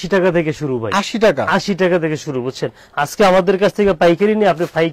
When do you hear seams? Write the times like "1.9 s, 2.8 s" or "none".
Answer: none